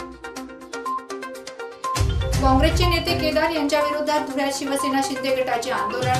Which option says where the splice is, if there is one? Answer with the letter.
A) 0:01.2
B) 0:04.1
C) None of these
A